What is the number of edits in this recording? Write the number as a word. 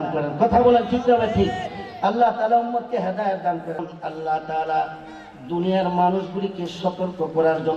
one